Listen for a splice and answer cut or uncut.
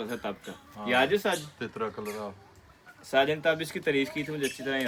uncut